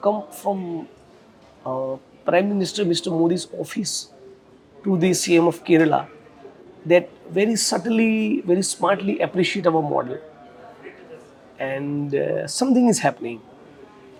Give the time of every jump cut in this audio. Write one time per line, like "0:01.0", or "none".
none